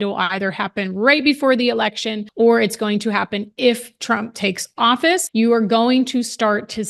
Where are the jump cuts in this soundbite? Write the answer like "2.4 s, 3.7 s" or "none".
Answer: none